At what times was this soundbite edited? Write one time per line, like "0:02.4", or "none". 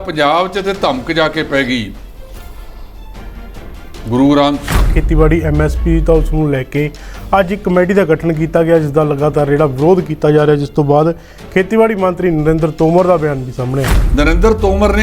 0:04.9
0:14.0